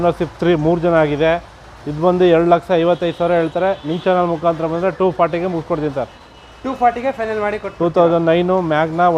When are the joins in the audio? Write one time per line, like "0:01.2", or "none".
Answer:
none